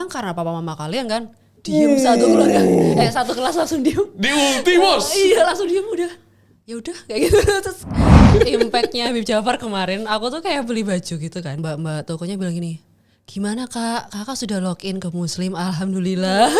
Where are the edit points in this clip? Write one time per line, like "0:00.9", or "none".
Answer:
0:08.3
0:11.6